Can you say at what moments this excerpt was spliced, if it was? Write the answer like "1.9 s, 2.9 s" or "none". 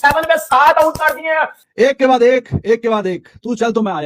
1.6 s